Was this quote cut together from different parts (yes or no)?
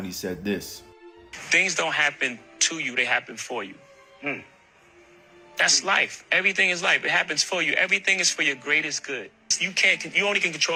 no